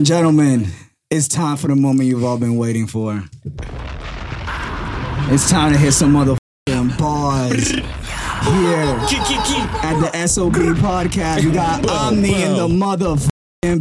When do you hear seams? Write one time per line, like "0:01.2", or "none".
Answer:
none